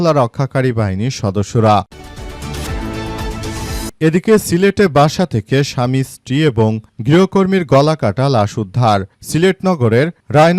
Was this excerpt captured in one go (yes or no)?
no